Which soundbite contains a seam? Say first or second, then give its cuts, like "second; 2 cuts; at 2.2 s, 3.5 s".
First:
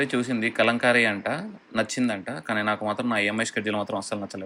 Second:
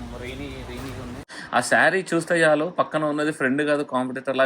second; 1 cut; at 1.3 s